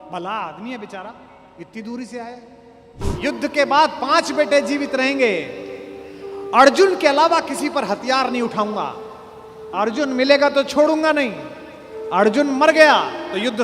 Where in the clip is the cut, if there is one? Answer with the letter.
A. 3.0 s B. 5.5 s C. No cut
A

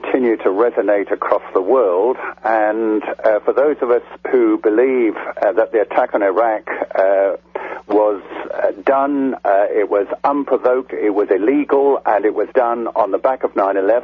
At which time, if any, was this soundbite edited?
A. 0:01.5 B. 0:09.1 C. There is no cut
A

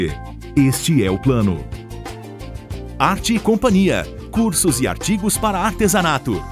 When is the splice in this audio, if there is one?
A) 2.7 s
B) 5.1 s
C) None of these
C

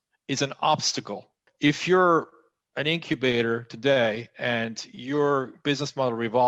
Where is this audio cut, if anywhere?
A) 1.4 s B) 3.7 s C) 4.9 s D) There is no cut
A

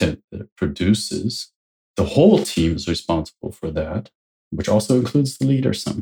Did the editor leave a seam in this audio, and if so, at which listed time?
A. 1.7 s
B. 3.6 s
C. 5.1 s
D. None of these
D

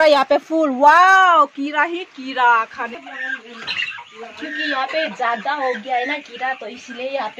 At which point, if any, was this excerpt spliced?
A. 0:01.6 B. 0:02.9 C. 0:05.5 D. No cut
B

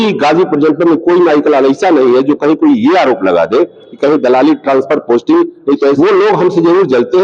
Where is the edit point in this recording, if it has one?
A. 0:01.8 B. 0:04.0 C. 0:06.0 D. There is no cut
C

